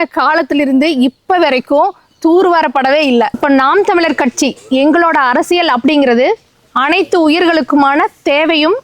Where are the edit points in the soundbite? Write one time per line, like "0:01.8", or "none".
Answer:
0:03.4